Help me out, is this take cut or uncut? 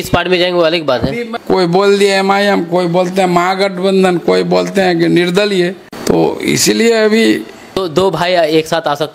cut